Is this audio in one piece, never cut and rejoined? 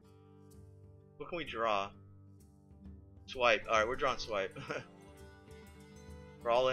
no; 1 cut; at 1.2 s

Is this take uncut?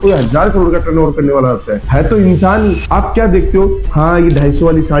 no; 1 cut; at 2.8 s

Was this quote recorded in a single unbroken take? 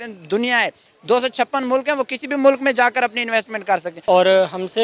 no; 1 cut; at 3.9 s

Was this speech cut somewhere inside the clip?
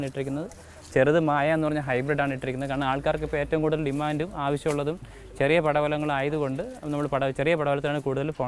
no; 0 cuts

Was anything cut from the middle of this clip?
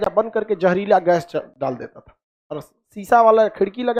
no; 0 cuts

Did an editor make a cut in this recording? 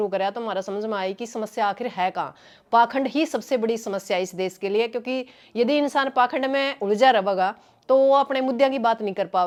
no; 0 cuts

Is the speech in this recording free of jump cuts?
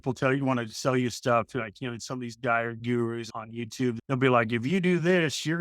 no; 1 cut; at 3.8 s

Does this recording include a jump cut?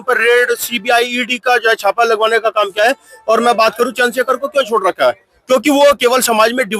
no; 0 cuts

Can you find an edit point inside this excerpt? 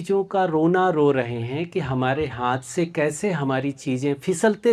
no; 0 cuts

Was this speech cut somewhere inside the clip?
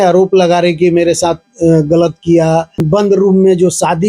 yes; 1 cut; at 3.0 s

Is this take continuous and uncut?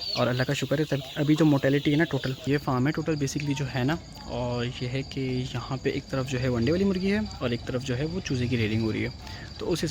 no; 1 cut; at 2.3 s

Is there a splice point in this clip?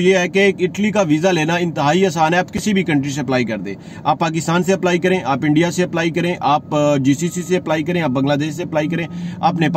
no; 0 cuts

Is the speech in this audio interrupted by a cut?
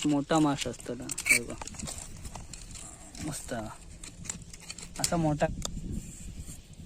yes; 1 cut; at 5.5 s

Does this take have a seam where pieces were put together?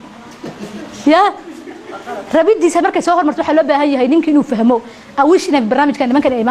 no; 0 cuts

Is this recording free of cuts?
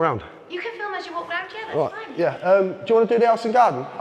yes; 0 cuts

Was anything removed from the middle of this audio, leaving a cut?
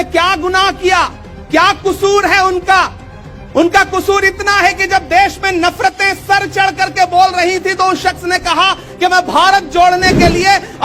no; 0 cuts

